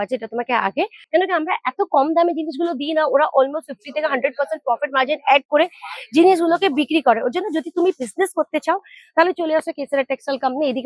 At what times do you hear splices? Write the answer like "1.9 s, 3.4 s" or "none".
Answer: 1.0 s